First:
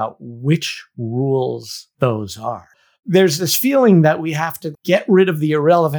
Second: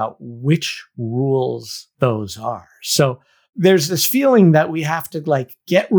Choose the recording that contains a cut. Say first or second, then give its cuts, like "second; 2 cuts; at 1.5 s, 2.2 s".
first; 2 cuts; at 2.8 s, 4.7 s